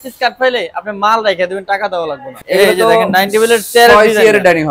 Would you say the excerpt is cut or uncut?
cut